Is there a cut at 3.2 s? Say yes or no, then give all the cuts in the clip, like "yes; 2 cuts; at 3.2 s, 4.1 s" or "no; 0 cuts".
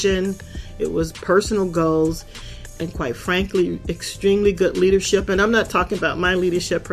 no; 0 cuts